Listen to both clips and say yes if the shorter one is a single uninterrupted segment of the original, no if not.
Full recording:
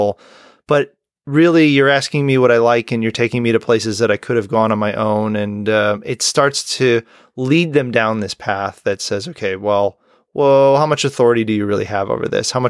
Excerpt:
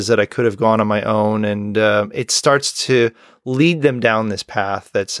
yes